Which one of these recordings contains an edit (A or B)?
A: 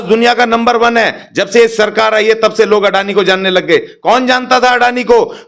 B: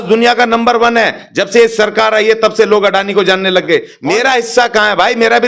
B